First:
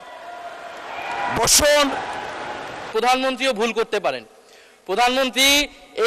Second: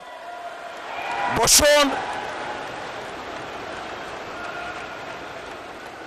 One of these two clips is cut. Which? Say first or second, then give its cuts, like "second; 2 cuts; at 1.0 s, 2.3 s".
first; 1 cut; at 2.8 s